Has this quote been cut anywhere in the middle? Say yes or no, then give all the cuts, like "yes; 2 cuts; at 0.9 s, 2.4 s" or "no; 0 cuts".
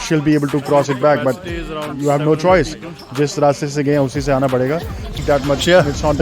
yes; 1 cut; at 5.2 s